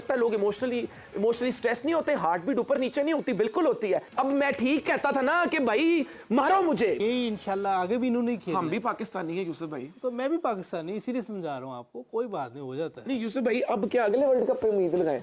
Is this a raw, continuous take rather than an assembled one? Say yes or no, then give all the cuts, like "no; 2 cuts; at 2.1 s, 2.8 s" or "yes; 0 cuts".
no; 2 cuts; at 4.1 s, 7.0 s